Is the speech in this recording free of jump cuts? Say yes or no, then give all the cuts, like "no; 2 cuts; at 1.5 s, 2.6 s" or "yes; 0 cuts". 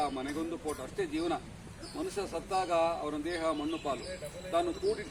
yes; 0 cuts